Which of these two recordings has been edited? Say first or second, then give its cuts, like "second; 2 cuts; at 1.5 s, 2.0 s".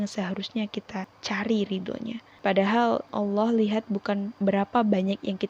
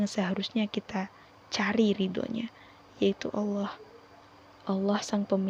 first; 4 cuts; at 1.1 s, 2.2 s, 3.1 s, 4.3 s